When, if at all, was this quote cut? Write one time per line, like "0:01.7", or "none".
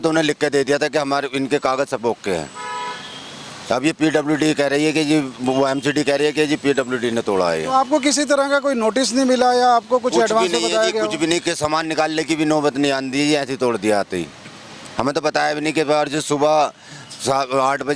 none